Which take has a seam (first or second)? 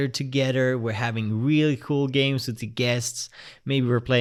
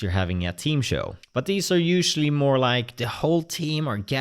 second